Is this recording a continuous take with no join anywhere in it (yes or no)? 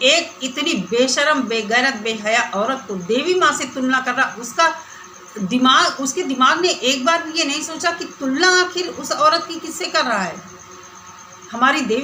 yes